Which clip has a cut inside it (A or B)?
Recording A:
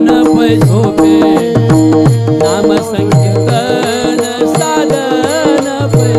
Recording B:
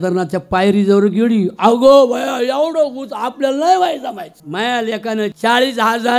B